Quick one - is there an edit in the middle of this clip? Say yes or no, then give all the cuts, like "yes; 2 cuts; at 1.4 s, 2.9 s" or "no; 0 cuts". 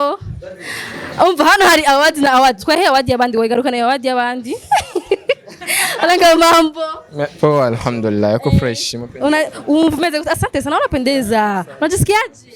no; 0 cuts